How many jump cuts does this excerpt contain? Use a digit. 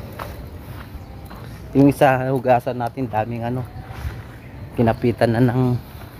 0